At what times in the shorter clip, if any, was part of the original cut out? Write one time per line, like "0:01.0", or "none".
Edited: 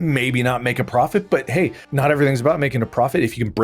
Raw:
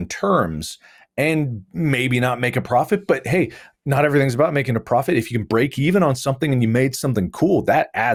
0:01.8